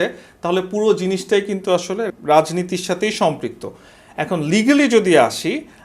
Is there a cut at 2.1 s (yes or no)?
yes